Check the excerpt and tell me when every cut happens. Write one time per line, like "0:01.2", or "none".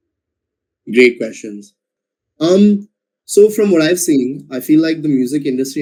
none